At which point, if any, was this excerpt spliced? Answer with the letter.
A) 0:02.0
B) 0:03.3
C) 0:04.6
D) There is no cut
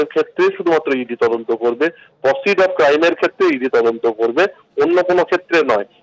D